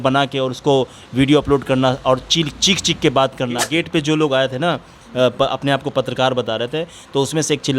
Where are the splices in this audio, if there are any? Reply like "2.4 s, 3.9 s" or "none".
3.7 s